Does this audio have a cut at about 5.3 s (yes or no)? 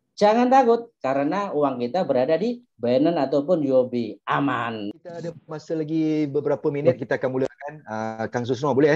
yes